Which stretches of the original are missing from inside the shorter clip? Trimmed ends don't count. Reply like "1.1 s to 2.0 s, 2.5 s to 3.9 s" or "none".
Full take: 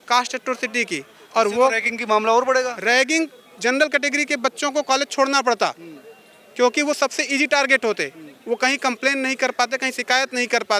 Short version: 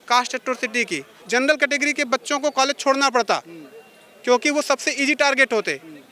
1.1 s to 3.4 s